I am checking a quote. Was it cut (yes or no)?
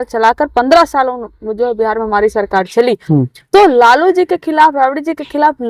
no